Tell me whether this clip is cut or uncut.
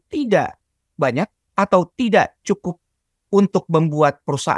uncut